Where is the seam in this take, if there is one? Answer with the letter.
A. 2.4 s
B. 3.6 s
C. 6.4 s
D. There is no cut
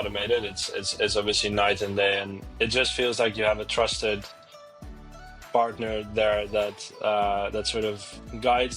A